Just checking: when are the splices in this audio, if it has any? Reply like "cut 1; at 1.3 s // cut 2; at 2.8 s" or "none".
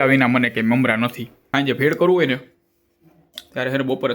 cut 1; at 1.5 s